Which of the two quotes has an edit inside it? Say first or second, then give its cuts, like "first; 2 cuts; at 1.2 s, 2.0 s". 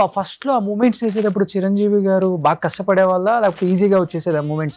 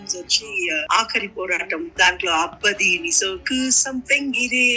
second; 2 cuts; at 0.9 s, 1.9 s